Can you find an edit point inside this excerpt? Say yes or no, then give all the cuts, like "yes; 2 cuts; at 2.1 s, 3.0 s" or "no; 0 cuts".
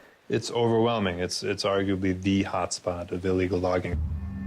yes; 1 cut; at 2.8 s